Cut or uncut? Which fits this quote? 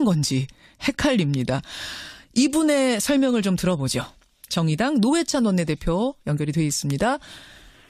uncut